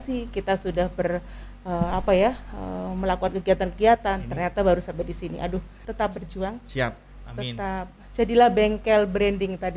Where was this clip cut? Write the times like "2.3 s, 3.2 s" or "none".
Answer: 5.8 s